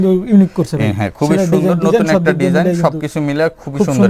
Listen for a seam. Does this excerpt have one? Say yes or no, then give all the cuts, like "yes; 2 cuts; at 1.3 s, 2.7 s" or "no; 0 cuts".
no; 0 cuts